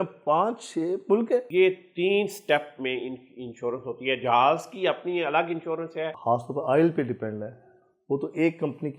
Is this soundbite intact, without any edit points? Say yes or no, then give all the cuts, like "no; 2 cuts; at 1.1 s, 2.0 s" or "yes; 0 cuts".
no; 2 cuts; at 1.5 s, 6.1 s